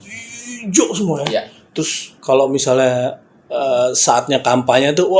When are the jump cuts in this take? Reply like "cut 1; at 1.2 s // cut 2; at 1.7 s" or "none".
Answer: none